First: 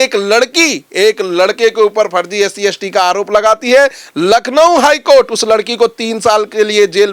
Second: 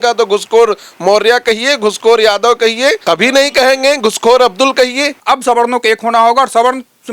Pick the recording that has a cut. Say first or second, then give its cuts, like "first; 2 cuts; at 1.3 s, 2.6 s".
second; 2 cuts; at 3.0 s, 5.2 s